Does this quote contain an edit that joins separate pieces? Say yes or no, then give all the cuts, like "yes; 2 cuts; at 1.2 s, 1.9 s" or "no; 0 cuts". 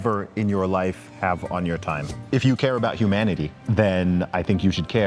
yes; 3 cuts; at 1.1 s, 2.2 s, 3.6 s